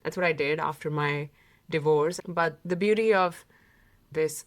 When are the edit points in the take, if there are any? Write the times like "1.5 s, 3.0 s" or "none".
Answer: 2.2 s